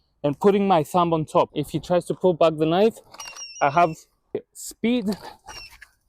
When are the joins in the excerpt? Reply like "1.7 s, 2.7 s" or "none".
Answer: 1.6 s, 4.5 s